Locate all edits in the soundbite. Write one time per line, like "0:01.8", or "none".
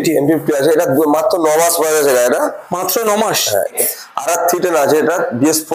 0:03.8